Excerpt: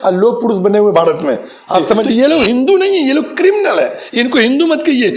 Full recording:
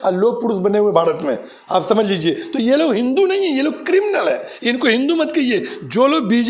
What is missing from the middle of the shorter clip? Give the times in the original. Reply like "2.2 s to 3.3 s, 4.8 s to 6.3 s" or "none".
2.0 s to 2.5 s